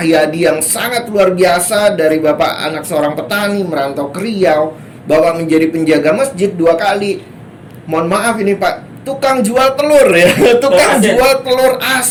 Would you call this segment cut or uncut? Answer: uncut